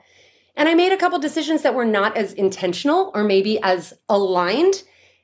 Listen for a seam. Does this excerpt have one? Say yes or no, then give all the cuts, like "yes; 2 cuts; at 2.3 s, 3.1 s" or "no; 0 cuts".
no; 0 cuts